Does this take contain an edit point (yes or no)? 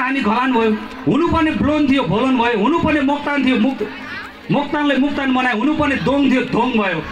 no